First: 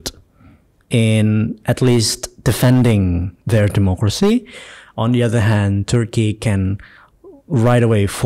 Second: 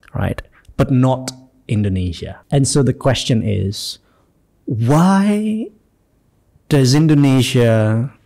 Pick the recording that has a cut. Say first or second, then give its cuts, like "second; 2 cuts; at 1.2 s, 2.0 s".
second; 1 cut; at 2.3 s